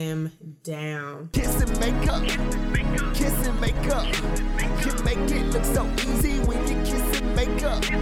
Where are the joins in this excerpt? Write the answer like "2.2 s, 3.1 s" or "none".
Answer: 1.2 s